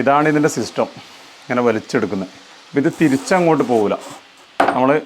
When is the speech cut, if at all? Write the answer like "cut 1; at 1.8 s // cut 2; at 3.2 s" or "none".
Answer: none